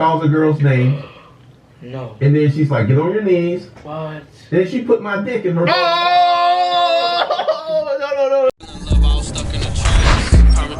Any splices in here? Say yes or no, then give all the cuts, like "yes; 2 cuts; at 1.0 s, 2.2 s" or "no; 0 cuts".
yes; 1 cut; at 8.5 s